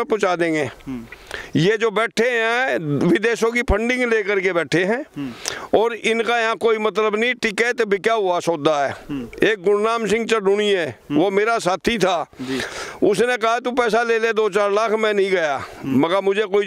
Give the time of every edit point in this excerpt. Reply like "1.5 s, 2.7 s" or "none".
none

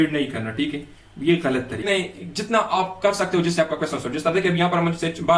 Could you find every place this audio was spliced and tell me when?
1.8 s

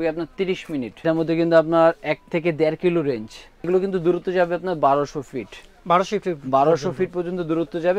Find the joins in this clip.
1.0 s, 3.7 s

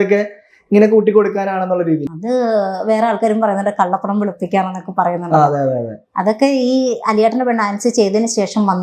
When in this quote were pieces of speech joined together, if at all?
2.1 s

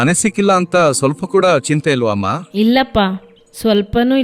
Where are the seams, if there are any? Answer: 2.4 s

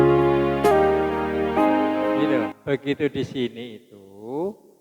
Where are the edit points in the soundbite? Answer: 2.6 s

